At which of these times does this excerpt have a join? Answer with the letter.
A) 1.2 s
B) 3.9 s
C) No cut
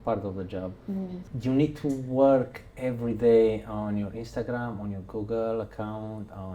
A